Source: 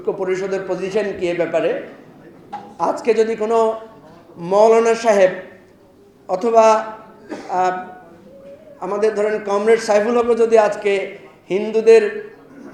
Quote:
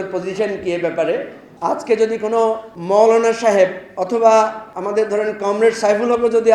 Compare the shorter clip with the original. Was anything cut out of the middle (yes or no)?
yes